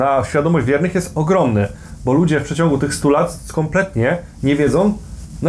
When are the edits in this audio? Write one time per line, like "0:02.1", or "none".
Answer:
none